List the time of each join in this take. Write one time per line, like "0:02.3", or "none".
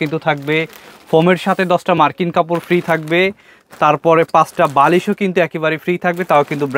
none